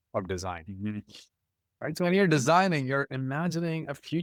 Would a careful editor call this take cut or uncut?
uncut